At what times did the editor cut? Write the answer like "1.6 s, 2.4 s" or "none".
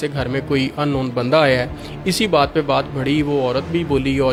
none